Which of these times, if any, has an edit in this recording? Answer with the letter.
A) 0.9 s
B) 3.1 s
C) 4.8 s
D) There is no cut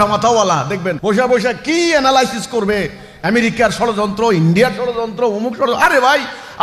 A